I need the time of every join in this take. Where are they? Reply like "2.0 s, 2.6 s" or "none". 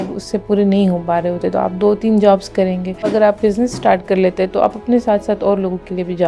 3.1 s